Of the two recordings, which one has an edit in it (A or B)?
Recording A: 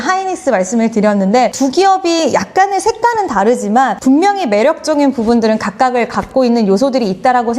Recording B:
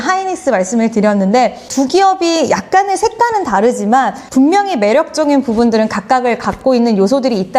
A